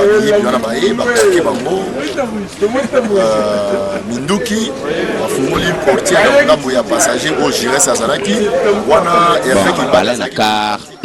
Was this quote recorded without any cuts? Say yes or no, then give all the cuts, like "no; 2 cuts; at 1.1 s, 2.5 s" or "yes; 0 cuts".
no; 1 cut; at 10.0 s